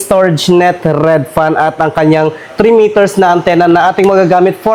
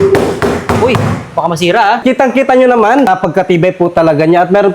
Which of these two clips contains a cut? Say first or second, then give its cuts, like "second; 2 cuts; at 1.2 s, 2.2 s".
second; 2 cuts; at 2.0 s, 3.1 s